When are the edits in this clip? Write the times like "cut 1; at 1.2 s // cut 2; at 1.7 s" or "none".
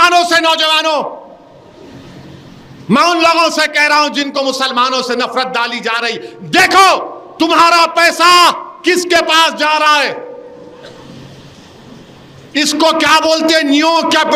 none